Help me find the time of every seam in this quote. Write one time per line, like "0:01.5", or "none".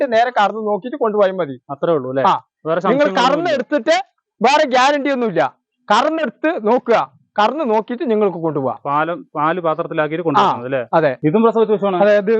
0:11.2

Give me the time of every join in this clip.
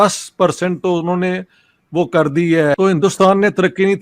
0:02.8

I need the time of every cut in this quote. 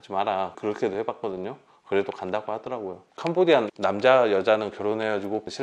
0:03.0

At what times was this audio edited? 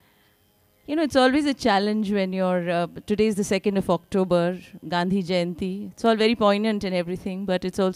0:06.6

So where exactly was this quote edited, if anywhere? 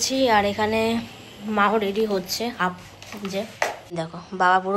0:03.8

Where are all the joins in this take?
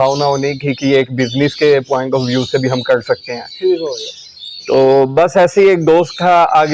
none

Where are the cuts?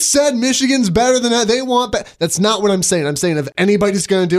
0:03.5

